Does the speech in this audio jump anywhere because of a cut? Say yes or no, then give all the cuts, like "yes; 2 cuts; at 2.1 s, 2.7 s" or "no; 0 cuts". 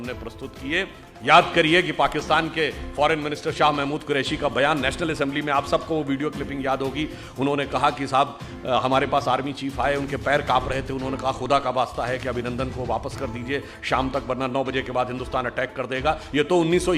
yes; 1 cut; at 1.0 s